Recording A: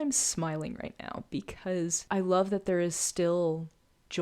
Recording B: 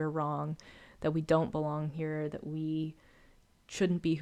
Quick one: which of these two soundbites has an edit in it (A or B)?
A